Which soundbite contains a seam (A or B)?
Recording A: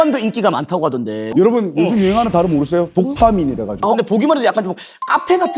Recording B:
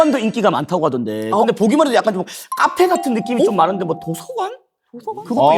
A